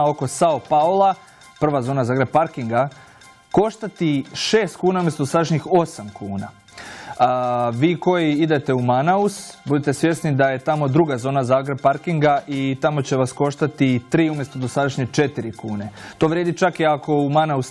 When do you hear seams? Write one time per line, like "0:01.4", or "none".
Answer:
0:14.3

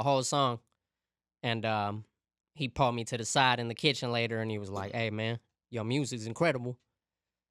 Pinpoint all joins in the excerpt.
none

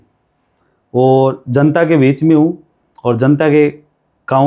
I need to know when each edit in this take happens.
none

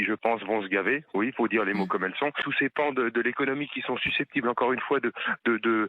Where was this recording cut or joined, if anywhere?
0:02.5

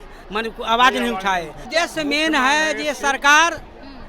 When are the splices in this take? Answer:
0:01.6

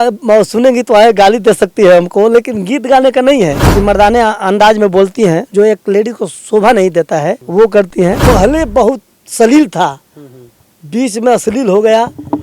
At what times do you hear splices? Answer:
0:03.6
0:08.2

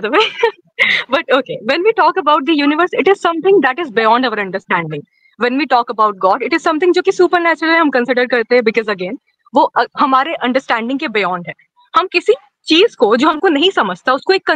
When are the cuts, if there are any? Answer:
none

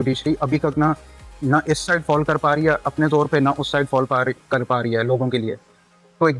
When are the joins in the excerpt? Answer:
none

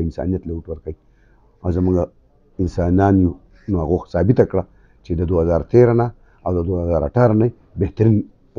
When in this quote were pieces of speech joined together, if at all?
none

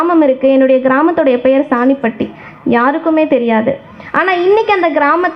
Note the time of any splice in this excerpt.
none

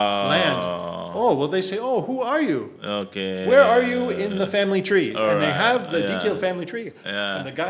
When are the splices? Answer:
none

